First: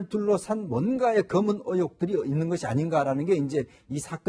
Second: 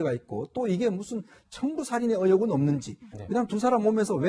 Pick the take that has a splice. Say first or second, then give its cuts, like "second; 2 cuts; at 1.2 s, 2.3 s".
first; 1 cut; at 2.3 s